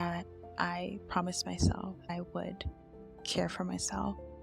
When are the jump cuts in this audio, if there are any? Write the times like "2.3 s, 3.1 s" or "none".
2.1 s